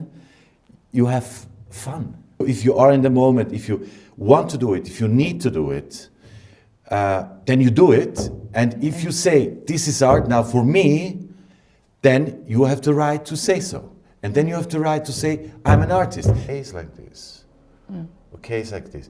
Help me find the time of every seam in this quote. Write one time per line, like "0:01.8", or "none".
0:02.4
0:16.5